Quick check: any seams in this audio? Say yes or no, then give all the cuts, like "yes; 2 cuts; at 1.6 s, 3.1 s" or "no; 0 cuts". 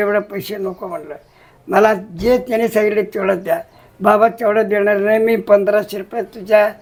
no; 0 cuts